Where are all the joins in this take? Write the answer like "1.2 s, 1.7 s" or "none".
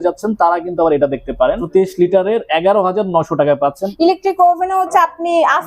1.6 s, 3.8 s